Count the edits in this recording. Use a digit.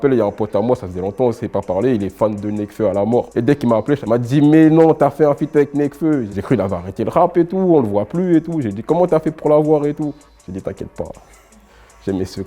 2